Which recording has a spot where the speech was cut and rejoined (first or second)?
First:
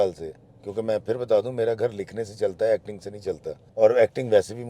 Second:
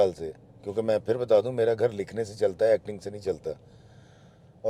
first